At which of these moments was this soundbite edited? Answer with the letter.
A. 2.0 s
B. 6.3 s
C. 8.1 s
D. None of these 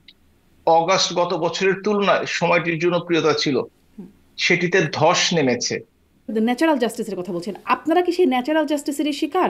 B